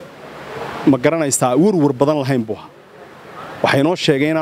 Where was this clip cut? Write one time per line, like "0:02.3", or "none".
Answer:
none

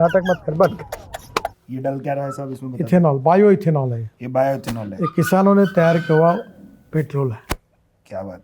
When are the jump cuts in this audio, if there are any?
0:01.6

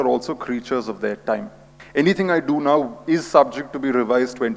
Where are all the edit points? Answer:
0:01.7

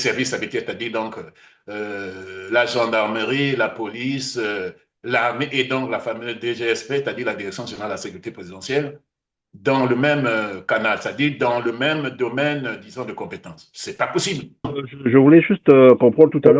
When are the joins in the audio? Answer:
0:14.8

